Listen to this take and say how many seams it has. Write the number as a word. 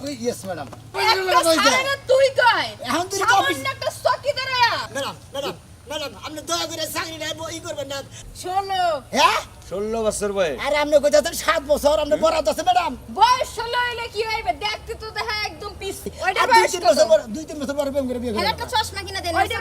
four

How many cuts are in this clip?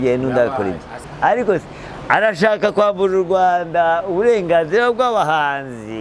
one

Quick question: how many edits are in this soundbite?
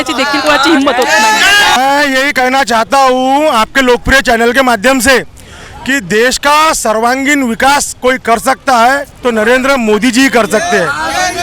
zero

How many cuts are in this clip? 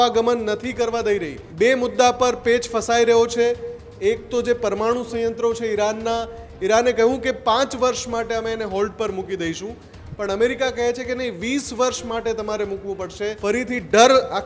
two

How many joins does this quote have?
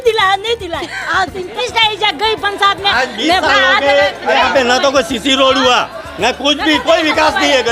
one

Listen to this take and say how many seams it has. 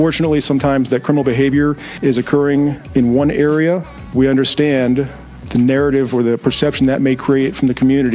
four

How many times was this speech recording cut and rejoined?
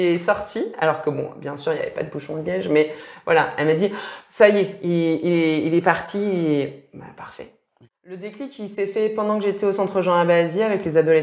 one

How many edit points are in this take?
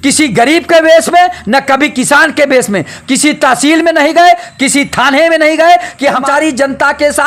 one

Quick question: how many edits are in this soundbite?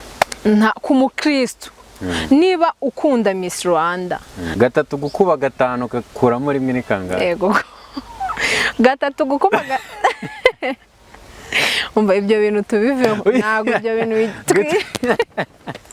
one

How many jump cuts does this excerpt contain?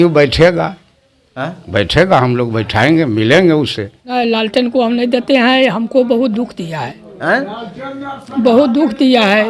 one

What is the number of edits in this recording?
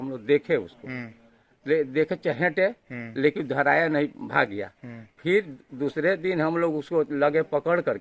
zero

